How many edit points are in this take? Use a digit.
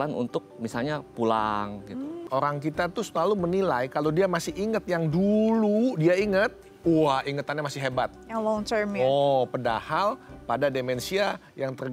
1